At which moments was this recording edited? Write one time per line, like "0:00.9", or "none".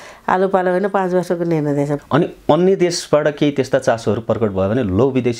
0:01.9